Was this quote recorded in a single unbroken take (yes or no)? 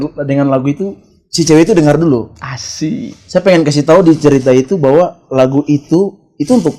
yes